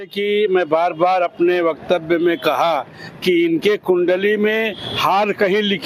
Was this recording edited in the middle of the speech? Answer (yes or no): no